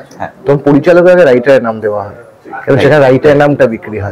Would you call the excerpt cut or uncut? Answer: uncut